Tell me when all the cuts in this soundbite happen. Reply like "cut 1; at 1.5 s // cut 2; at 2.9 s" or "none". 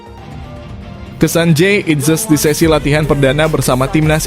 cut 1; at 1.2 s